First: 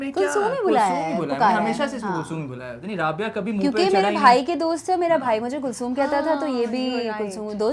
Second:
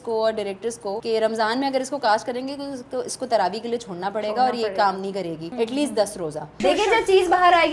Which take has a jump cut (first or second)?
second